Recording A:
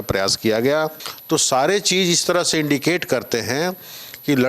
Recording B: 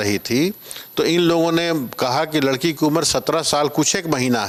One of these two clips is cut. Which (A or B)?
A